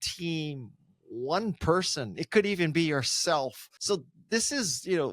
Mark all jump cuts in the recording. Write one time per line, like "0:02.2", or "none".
0:03.7